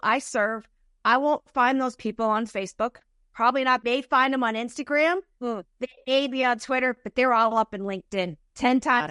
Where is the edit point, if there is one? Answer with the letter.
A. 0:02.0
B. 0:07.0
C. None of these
C